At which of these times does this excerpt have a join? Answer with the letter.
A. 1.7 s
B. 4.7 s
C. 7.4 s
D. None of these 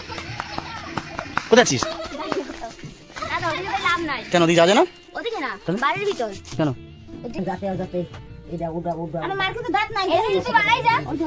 C